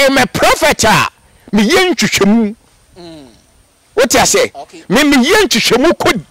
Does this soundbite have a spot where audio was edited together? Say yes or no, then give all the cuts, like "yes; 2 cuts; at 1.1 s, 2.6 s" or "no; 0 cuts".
no; 0 cuts